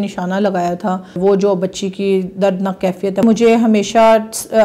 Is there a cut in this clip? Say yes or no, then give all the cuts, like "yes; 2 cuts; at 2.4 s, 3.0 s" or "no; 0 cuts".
yes; 2 cuts; at 1.2 s, 3.2 s